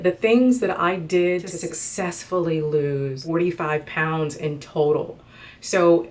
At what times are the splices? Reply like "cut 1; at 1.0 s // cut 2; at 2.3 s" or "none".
cut 1; at 1.5 s // cut 2; at 3.2 s